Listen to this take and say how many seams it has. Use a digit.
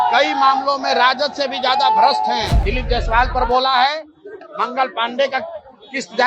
1